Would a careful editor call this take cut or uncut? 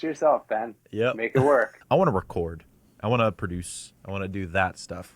cut